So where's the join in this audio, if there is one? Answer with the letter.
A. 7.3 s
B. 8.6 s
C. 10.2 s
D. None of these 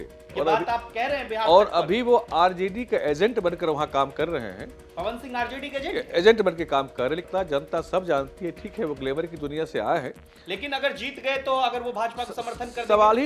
A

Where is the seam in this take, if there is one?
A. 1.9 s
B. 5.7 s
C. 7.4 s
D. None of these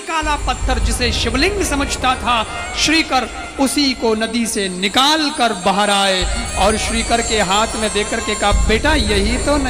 D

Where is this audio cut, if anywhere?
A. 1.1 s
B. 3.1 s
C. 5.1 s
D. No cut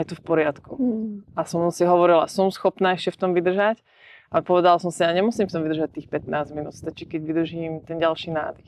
D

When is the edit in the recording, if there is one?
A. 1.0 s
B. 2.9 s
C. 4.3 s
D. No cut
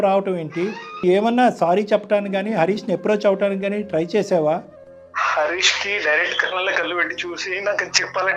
A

